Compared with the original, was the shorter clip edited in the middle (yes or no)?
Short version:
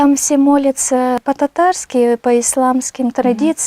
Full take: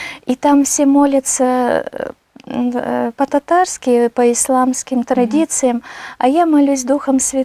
yes